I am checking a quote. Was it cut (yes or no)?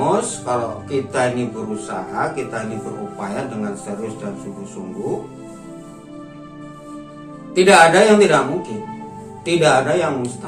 no